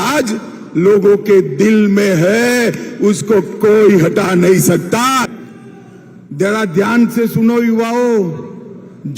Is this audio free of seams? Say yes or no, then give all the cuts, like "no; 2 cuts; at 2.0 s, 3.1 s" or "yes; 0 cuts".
no; 1 cut; at 5.4 s